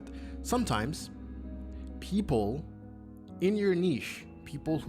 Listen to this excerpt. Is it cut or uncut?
uncut